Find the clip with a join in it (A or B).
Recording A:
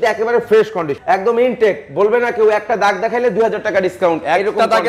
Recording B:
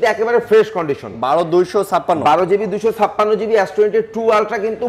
A